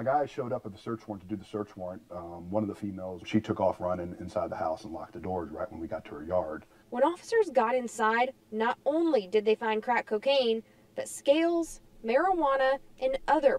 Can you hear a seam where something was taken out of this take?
no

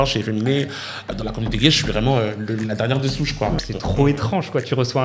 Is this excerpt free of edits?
no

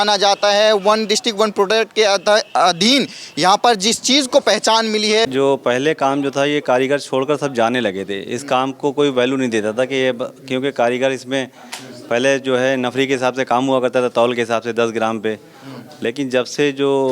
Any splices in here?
yes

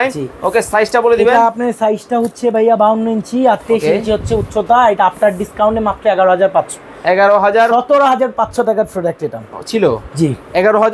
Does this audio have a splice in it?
no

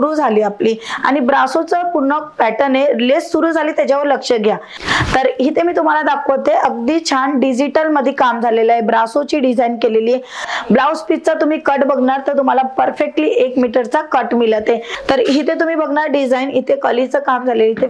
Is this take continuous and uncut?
no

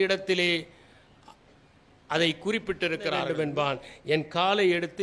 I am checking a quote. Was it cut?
yes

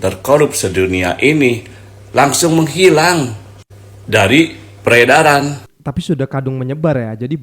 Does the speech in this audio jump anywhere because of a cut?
no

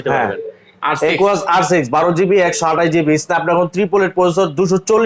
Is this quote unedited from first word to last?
yes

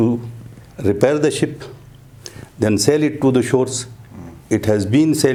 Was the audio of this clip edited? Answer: no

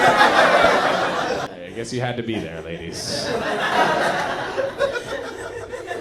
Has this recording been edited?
yes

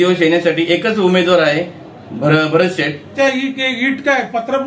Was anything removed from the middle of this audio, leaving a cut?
yes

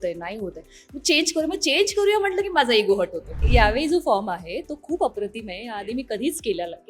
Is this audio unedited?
no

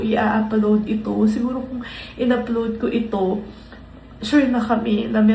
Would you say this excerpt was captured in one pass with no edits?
yes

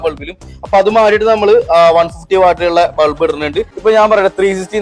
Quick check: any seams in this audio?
yes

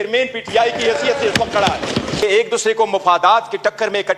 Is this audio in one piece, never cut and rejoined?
no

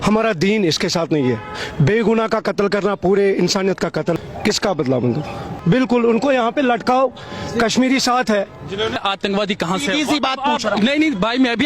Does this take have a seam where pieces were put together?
yes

